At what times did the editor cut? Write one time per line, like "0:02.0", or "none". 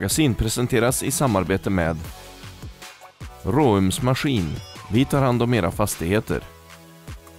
0:06.5